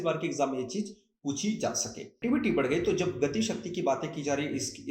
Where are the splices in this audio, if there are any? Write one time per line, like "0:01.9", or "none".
0:02.2